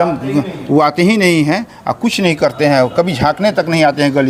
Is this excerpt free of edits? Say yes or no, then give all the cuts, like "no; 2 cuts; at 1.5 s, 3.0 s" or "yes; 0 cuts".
yes; 0 cuts